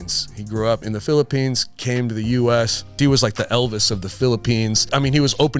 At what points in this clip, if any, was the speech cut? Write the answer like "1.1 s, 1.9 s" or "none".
0.8 s, 2.8 s, 4.9 s